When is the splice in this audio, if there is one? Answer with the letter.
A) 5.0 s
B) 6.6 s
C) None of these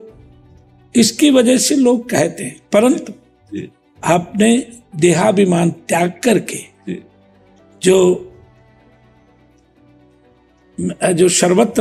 C